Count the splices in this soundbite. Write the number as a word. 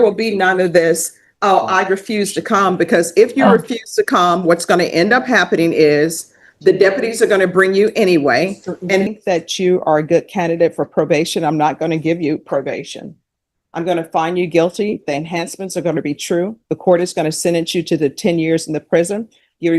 one